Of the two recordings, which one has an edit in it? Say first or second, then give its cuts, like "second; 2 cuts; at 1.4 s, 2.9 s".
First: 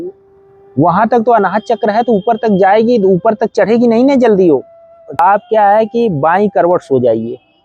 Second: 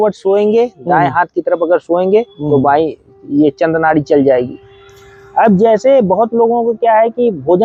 first; 1 cut; at 5.1 s